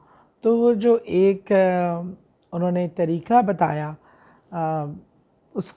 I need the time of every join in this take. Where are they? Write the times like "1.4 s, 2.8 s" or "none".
none